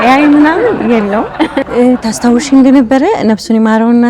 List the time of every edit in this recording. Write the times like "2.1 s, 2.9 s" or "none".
1.7 s